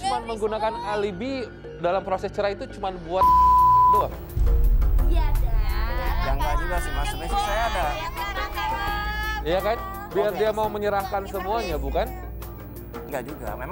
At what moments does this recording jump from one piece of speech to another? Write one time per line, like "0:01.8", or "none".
none